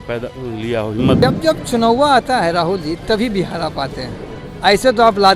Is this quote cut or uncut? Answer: cut